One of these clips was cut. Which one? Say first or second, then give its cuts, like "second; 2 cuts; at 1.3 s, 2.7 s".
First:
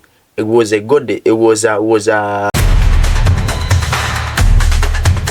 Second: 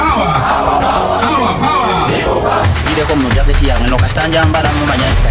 first; 1 cut; at 2.5 s